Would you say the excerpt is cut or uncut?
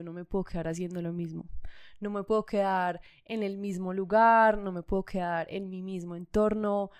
uncut